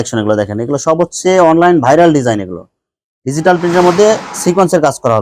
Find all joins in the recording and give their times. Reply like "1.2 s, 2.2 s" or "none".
none